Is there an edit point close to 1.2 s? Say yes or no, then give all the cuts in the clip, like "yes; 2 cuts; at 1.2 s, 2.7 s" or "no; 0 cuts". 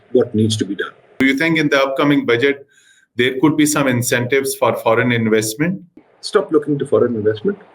yes; 2 cuts; at 1.2 s, 6.1 s